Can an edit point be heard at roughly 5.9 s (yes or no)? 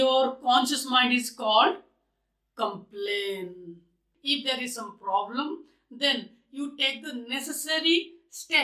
no